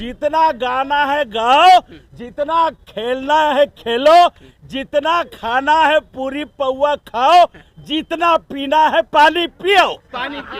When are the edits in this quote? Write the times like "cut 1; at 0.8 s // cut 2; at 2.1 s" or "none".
none